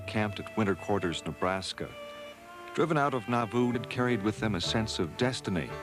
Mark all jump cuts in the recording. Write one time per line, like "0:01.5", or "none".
none